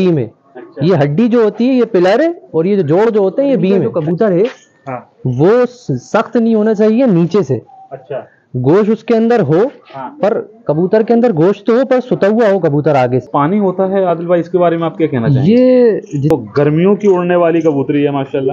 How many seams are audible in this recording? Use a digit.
3